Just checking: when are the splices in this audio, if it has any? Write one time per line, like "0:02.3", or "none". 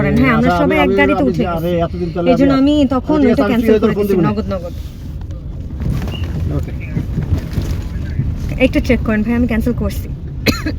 none